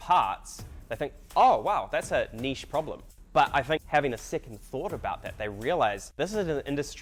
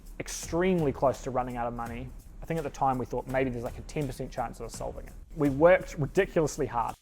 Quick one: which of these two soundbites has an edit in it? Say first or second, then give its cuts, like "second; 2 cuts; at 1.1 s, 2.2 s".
second; 2 cuts; at 2.1 s, 5.2 s